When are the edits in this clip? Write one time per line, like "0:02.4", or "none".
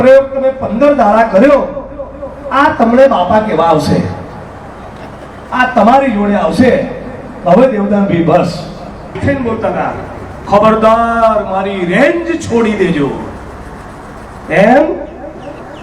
0:09.2